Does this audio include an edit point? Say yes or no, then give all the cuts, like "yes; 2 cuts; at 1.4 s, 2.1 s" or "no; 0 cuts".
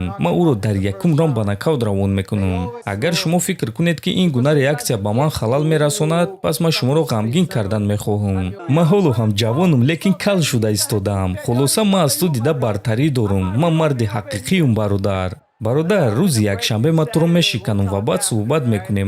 yes; 2 cuts; at 2.7 s, 8.5 s